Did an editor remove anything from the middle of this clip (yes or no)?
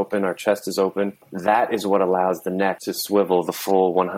yes